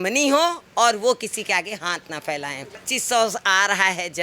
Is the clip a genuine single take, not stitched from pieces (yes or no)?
no